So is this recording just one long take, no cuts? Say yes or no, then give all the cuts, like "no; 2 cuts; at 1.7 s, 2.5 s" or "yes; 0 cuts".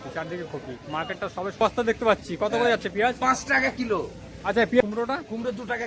no; 2 cuts; at 1.6 s, 4.8 s